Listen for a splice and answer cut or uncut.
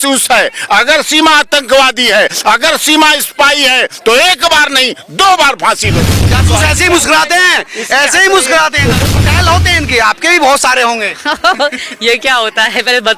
cut